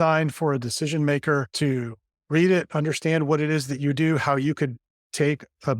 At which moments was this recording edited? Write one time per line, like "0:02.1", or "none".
0:01.5